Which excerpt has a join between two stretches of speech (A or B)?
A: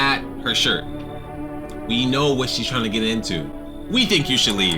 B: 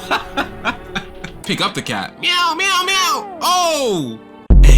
B